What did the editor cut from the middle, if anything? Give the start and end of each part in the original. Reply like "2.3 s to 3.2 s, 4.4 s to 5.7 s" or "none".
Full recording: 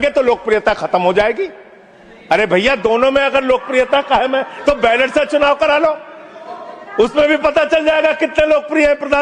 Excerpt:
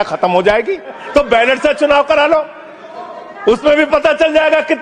1.7 s to 4.5 s